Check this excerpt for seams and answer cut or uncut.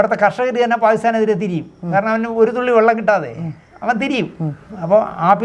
uncut